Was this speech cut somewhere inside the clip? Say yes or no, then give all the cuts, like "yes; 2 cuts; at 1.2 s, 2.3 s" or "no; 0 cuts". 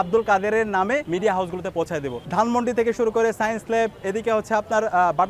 yes; 1 cut; at 2.3 s